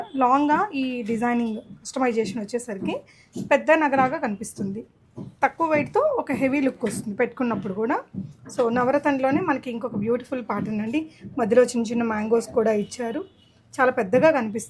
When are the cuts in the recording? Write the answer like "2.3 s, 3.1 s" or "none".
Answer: none